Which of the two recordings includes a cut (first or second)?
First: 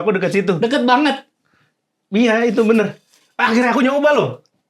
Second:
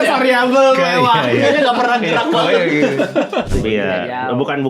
second